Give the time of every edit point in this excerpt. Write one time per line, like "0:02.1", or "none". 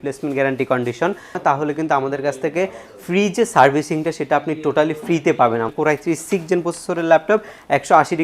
0:01.3
0:05.7